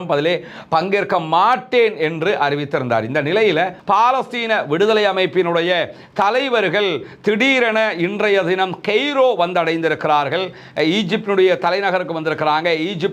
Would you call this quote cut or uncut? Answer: cut